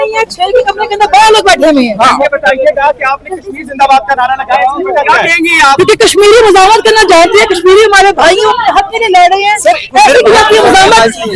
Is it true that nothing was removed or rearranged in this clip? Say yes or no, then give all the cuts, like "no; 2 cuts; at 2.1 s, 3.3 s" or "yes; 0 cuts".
yes; 0 cuts